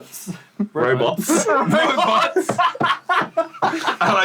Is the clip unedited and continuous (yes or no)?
yes